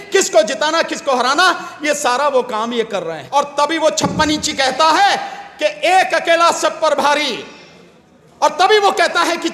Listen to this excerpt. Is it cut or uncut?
cut